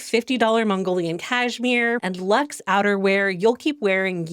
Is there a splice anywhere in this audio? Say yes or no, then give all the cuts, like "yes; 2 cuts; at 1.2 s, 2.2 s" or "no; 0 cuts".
yes; 1 cut; at 2.0 s